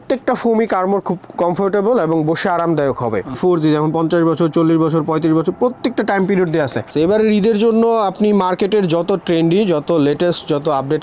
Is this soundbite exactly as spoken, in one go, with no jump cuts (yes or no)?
no